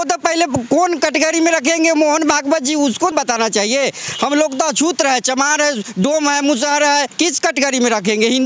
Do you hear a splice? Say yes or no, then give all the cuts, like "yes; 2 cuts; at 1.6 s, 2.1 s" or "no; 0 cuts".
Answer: yes; 2 cuts; at 3.1 s, 7.1 s